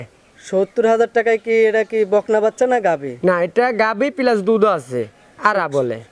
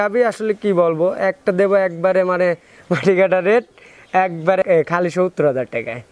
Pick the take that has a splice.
second; 1 cut; at 4.6 s

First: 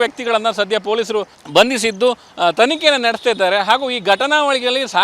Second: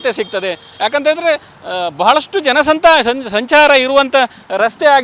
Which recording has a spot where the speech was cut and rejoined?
first; 1 cut; at 1.4 s

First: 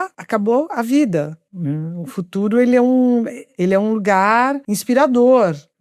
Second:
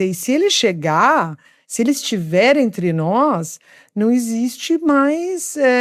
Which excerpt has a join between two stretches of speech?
first; 3 cuts; at 1.4 s, 3.4 s, 4.7 s

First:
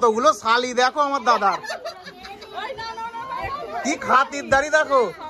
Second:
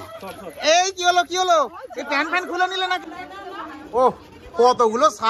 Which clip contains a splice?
second; 1 cut; at 3.0 s

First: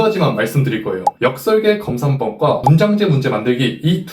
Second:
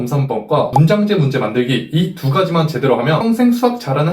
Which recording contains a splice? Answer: second; 1 cut; at 3.2 s

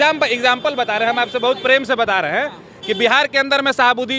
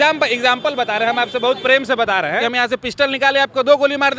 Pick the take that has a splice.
second; 1 cut; at 2.4 s

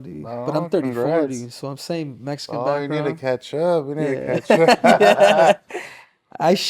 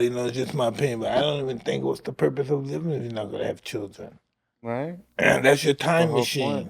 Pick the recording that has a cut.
second; 1 cut; at 5.0 s

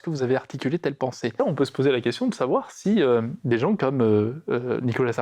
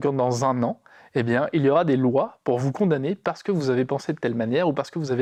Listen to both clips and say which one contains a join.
first; 1 cut; at 1.3 s

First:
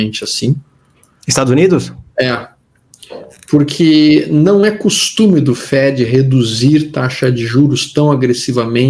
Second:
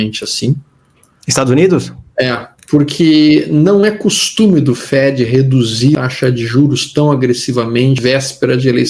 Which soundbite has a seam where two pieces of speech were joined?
second; 3 cuts; at 2.5 s, 5.9 s, 8.0 s

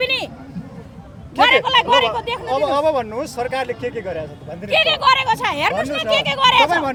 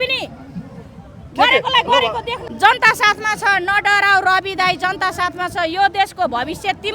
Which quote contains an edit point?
second; 1 cut; at 2.4 s

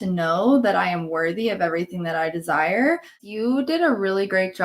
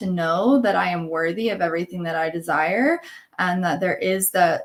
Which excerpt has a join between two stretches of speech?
first; 1 cut; at 3.2 s

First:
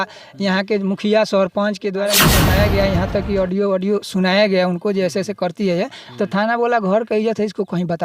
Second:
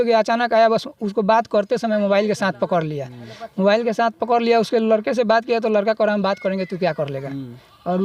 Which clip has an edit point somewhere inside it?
first; 1 cut; at 2.3 s

